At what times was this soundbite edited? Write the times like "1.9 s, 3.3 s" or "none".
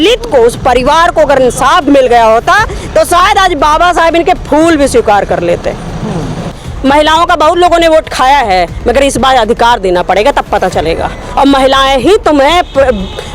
6.7 s